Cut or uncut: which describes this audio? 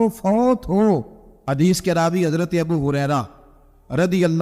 cut